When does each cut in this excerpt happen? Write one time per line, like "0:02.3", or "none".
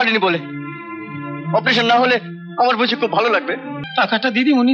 0:03.8